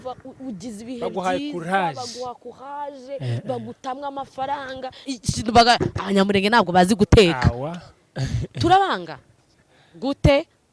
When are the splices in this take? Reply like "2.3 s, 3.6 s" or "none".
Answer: 5.1 s